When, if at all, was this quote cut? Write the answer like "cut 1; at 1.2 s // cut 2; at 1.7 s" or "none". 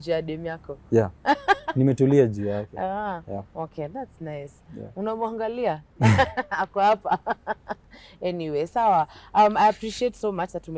none